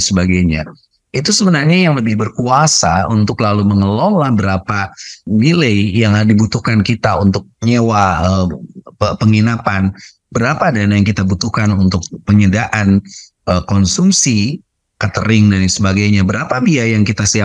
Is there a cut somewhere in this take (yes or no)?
yes